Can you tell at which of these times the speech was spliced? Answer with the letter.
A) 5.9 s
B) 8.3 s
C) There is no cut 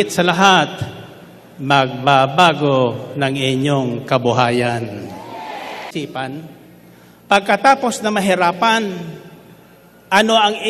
A